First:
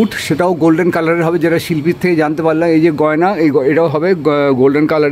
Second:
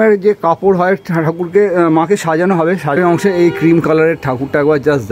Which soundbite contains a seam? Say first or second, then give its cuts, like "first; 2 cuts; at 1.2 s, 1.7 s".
second; 1 cut; at 3.0 s